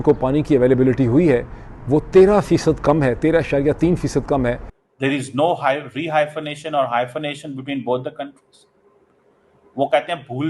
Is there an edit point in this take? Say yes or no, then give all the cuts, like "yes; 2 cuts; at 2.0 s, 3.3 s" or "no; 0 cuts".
yes; 1 cut; at 4.7 s